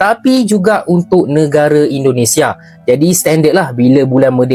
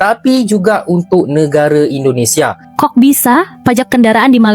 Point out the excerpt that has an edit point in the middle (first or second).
second